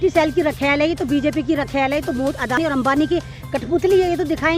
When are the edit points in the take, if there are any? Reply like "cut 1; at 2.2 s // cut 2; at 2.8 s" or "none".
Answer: cut 1; at 2.6 s